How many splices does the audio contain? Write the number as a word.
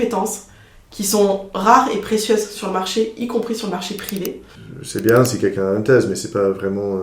one